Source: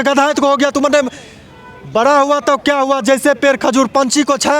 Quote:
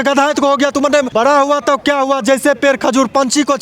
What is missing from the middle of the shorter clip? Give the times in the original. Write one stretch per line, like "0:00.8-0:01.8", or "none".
0:01.1-0:01.9